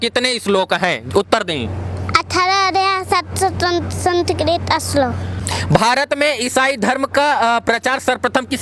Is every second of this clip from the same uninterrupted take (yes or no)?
no